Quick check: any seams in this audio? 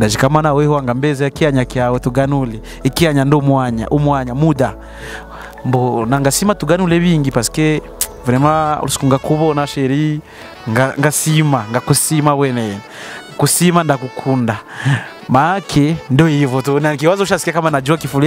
no; 0 cuts

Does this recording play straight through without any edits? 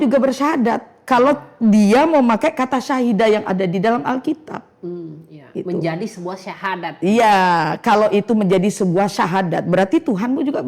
yes; 0 cuts

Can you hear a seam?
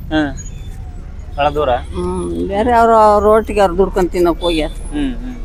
no; 0 cuts

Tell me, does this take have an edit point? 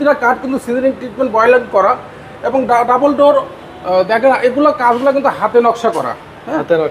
no; 0 cuts

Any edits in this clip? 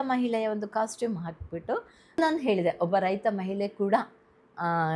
yes; 1 cut; at 2.2 s

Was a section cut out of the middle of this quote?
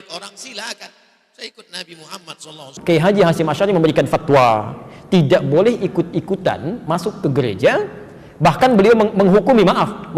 yes; 1 cut; at 2.7 s

